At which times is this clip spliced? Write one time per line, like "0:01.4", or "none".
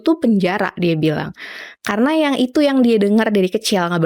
none